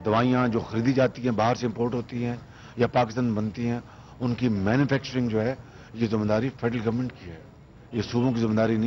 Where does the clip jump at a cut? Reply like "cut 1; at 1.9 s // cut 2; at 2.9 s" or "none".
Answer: none